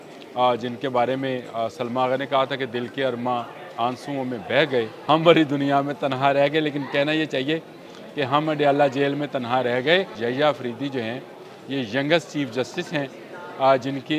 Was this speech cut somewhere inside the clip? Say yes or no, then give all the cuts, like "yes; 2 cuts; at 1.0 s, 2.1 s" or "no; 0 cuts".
yes; 2 cuts; at 5.0 s, 10.2 s